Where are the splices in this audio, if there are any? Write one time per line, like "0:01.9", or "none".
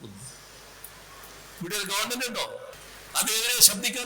0:02.8